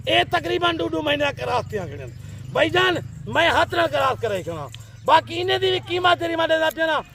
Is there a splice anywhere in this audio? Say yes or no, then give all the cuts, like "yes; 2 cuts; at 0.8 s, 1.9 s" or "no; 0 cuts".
no; 0 cuts